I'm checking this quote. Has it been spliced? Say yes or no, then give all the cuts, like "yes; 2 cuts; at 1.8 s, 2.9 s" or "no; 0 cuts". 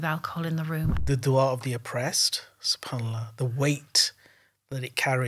yes; 1 cut; at 1.0 s